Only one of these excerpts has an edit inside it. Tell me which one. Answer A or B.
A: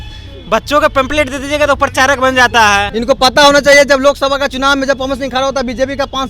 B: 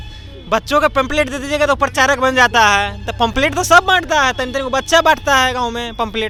A